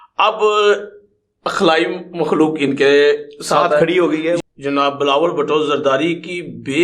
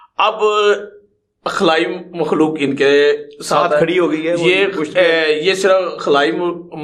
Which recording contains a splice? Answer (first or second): first